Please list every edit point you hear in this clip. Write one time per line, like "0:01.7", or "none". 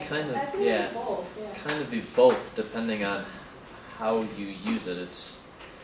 none